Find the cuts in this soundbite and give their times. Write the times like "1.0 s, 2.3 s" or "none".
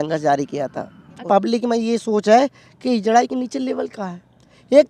1.2 s